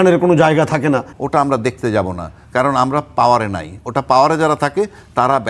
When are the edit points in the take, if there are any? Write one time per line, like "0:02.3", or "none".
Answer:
0:01.1